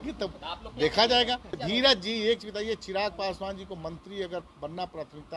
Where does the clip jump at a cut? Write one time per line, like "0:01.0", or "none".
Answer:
0:01.6